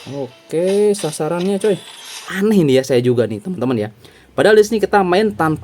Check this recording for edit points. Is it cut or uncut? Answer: cut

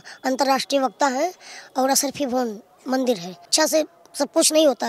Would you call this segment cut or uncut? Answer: cut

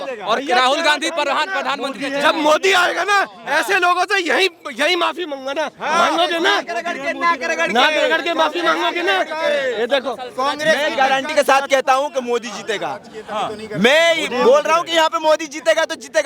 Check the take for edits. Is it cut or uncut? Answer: uncut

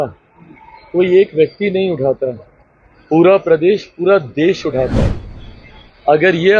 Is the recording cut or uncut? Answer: uncut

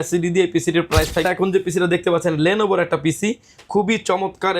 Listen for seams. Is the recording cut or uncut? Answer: cut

